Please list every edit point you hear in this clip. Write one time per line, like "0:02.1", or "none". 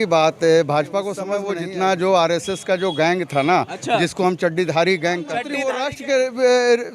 0:01.3
0:05.6

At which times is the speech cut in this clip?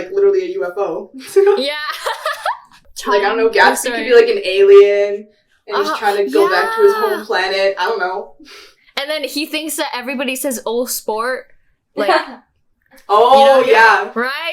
0:02.9

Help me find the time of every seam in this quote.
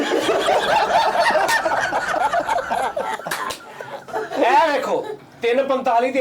0:04.1

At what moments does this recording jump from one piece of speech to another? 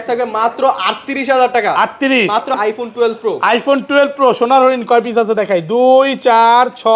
0:02.5

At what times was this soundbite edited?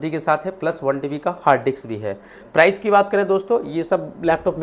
none

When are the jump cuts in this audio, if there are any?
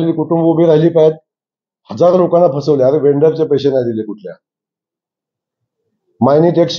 none

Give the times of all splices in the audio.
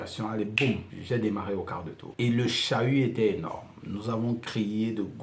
0:00.9
0:02.0

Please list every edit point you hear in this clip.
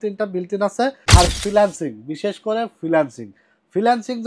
0:01.0

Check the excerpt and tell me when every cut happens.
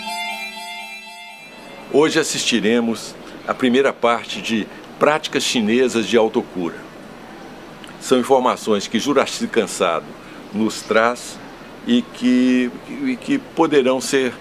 0:01.1

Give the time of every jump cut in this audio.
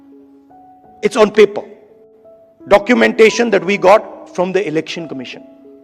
0:01.0

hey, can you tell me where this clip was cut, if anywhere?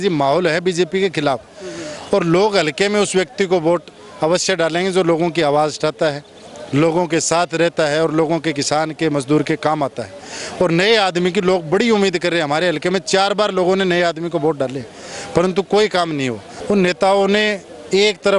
0:16.5

